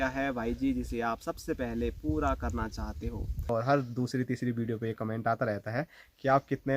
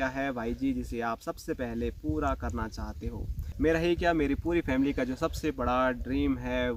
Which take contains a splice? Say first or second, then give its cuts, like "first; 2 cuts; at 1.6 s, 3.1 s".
first; 1 cut; at 3.5 s